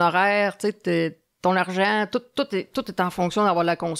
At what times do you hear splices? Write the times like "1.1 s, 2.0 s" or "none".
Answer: none

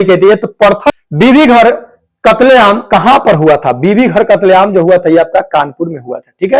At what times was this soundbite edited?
0.9 s

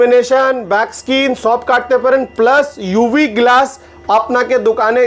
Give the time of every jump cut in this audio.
none

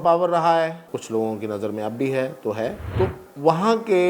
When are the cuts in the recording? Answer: 0.8 s, 2.8 s

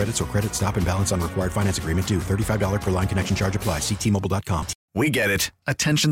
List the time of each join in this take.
4.8 s

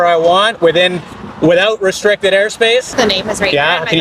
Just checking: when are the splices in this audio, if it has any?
2.9 s

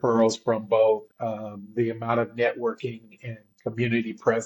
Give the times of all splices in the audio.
1.1 s

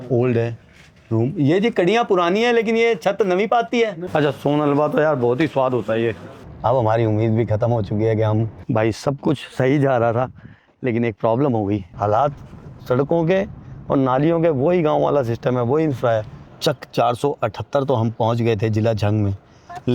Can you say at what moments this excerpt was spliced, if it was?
4.0 s, 6.4 s, 8.6 s, 11.9 s, 16.4 s

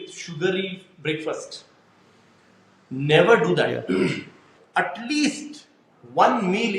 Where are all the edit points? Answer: 4.5 s

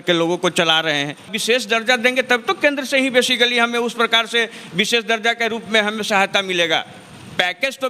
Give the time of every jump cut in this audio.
1.3 s

